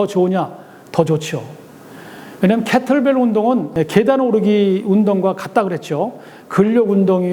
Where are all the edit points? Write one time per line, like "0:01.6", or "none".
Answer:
0:03.7